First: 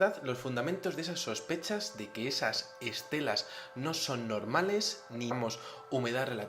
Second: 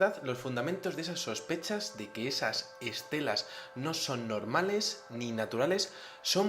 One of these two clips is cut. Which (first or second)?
second